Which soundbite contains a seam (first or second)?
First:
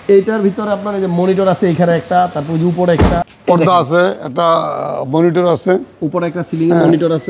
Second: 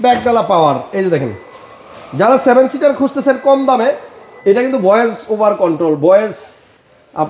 first